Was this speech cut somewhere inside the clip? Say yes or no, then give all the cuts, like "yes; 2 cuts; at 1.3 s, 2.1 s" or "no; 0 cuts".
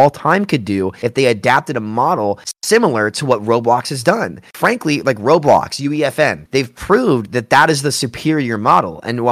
no; 0 cuts